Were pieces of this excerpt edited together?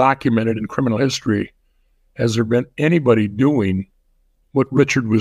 no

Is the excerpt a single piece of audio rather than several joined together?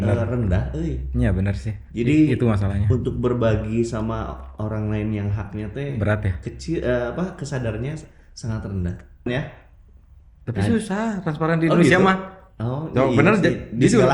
no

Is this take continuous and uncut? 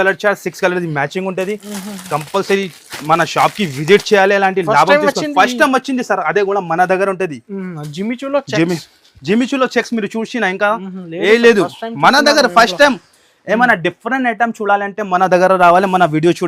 yes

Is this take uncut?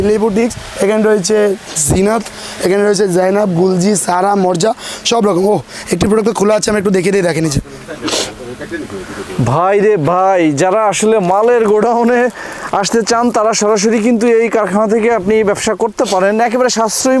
yes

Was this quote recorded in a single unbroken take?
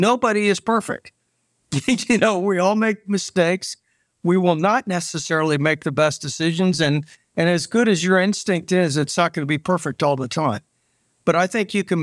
yes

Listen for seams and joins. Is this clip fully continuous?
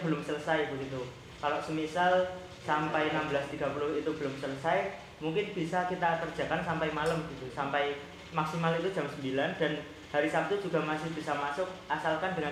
yes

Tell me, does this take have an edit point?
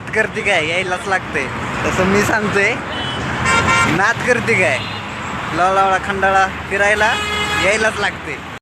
no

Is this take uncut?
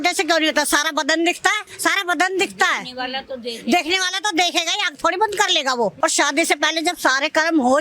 no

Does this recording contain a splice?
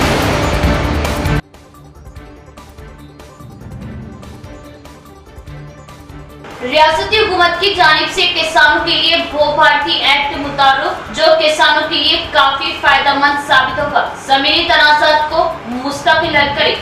no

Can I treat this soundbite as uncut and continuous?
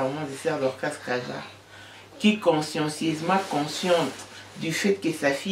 yes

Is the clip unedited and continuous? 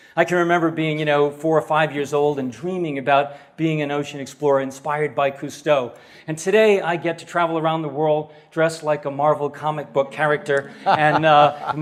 yes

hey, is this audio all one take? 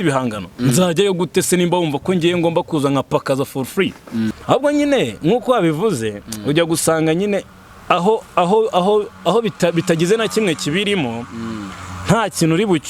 no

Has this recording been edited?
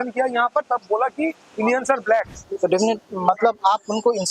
yes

